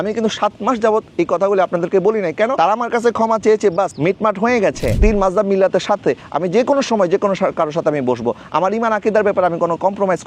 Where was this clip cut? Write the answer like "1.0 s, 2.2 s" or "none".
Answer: 3.9 s, 5.0 s